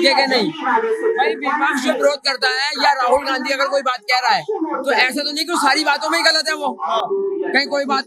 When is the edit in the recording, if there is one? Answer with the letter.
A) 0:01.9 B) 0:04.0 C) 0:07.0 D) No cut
D